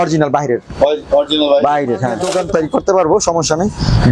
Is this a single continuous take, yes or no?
no